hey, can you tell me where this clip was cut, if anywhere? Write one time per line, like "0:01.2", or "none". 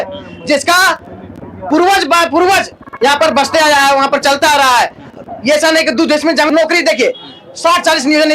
0:06.5

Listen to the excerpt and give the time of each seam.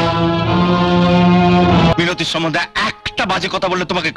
0:01.9

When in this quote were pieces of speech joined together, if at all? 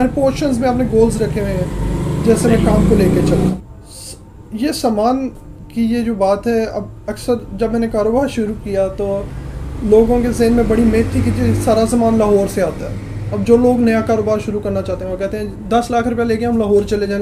0:03.5

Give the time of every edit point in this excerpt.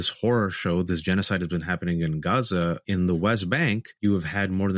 0:02.8
0:03.9

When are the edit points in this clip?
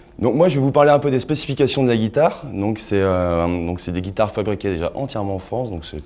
0:03.1

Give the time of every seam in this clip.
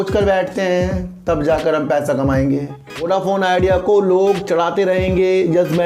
0:03.0

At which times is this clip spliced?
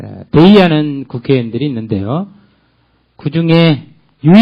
none

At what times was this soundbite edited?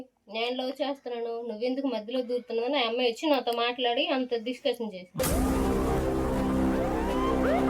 0:05.2

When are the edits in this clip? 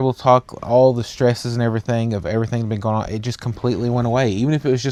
none

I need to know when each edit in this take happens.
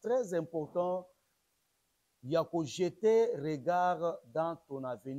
none

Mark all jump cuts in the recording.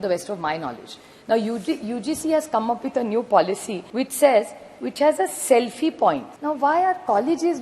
0:03.8
0:06.3

